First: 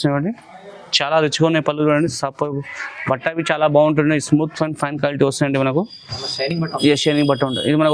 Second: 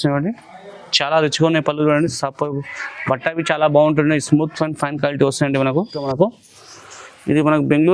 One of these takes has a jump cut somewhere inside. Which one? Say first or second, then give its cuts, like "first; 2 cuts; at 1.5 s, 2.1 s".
second; 1 cut; at 6.1 s